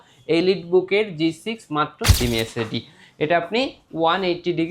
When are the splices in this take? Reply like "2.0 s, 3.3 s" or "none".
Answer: 2.2 s